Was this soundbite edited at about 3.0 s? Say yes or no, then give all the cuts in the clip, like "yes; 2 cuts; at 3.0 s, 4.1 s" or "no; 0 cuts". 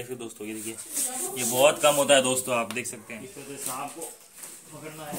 yes; 1 cut; at 3.0 s